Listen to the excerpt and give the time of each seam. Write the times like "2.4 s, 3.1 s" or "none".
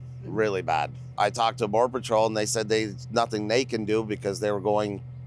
1.1 s